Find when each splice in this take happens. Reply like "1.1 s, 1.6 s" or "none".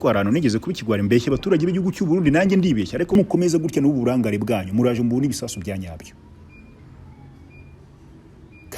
3.2 s